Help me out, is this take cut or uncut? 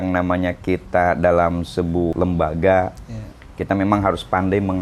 cut